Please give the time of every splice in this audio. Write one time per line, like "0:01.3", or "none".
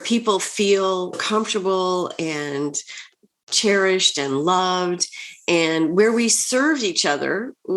0:01.2